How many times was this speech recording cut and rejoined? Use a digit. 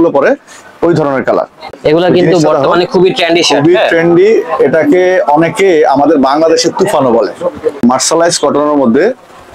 2